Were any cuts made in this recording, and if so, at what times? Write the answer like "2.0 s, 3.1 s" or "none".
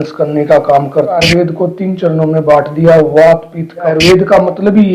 1.2 s, 3.9 s

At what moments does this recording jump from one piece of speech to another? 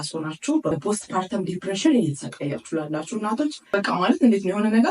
0.7 s, 3.7 s

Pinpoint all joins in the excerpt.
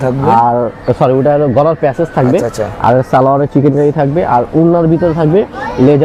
none

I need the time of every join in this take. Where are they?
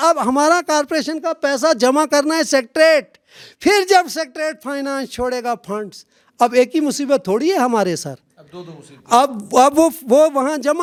none

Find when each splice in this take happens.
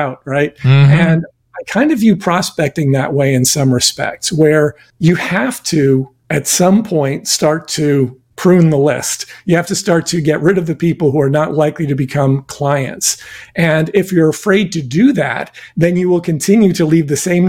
4.9 s, 6.2 s, 8.2 s

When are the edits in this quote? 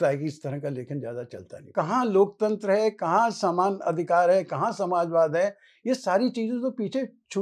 1.7 s

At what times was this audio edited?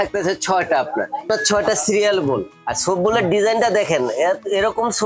1.3 s, 2.6 s

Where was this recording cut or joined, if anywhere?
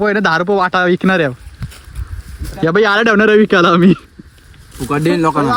none

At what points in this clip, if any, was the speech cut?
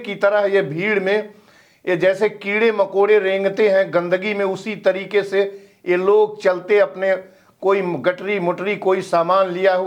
none

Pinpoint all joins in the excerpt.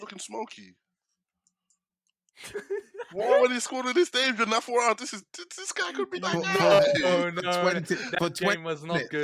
none

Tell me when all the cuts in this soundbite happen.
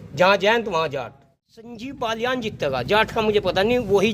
1.8 s

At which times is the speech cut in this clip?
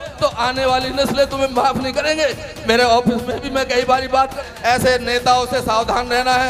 4.4 s

